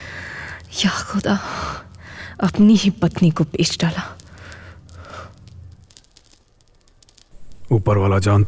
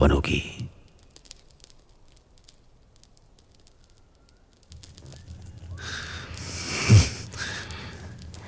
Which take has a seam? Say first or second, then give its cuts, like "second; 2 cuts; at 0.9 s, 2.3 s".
first; 1 cut; at 7.3 s